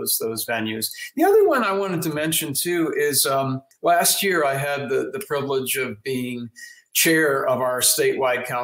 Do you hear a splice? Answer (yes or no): yes